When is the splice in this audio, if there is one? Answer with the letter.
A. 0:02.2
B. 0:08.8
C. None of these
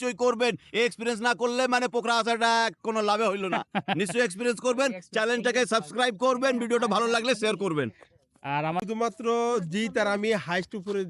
B